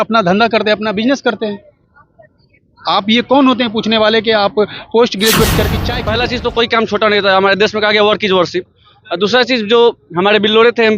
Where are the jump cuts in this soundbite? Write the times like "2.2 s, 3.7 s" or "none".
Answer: 5.8 s